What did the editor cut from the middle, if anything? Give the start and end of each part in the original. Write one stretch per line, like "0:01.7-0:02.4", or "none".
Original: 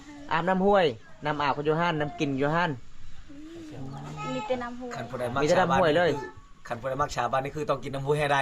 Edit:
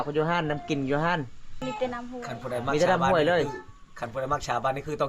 0:03.1-0:04.2